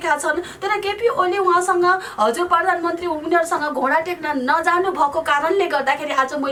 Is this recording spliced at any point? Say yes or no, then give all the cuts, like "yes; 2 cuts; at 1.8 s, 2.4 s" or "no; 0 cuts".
no; 0 cuts